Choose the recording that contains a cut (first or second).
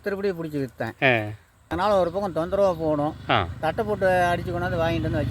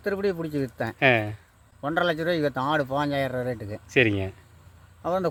first